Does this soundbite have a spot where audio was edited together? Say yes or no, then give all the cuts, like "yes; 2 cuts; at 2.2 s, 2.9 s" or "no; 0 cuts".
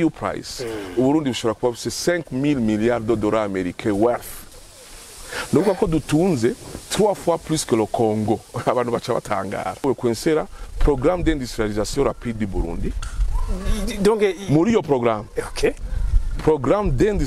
yes; 1 cut; at 9.8 s